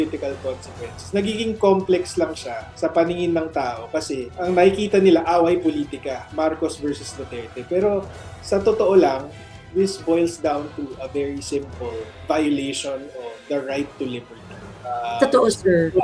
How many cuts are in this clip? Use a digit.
0